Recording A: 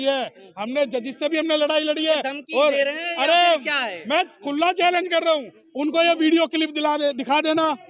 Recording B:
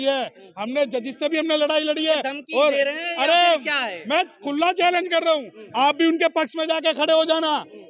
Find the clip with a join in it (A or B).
A